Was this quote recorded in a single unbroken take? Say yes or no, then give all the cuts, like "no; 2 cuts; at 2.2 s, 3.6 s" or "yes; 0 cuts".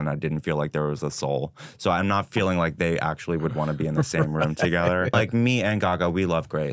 no; 1 cut; at 5.1 s